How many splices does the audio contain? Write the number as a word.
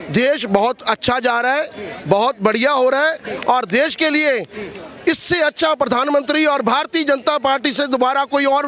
zero